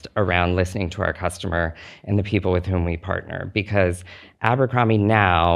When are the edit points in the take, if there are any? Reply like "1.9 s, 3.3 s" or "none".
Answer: none